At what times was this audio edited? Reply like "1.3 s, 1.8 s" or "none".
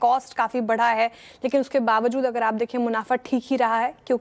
2.2 s